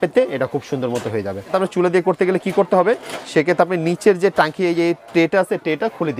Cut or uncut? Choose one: cut